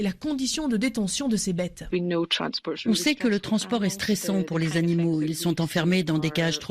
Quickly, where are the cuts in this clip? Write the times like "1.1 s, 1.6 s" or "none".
1.8 s

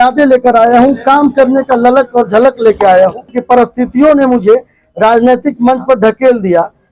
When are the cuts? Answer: 3.4 s

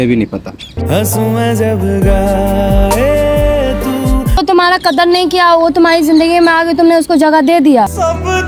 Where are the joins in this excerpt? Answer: 4.4 s

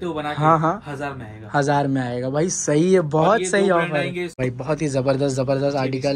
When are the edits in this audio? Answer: 4.4 s

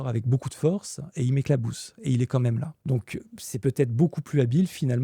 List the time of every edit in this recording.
2.7 s

